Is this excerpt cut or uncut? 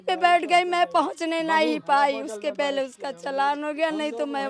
uncut